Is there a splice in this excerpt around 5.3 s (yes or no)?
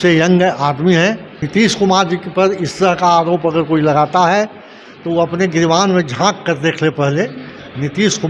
no